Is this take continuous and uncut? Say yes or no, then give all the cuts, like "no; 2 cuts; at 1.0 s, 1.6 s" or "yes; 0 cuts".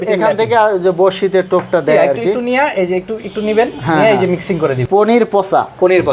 no; 1 cut; at 4.8 s